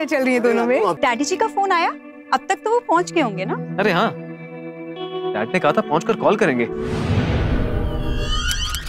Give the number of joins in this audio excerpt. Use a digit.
2